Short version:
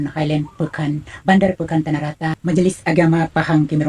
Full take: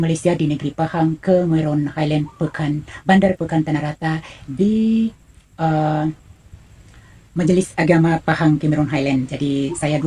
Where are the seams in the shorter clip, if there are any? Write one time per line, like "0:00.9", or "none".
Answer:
0:02.4